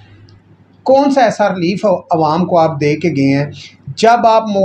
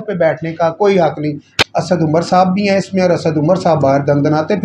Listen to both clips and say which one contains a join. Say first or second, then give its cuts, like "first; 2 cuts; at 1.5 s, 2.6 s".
second; 1 cut; at 1.6 s